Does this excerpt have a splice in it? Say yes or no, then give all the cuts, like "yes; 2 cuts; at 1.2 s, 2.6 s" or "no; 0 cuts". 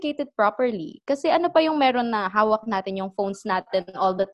no; 0 cuts